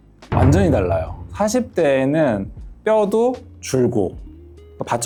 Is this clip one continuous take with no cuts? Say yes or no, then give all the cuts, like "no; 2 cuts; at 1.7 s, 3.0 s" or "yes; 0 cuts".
yes; 0 cuts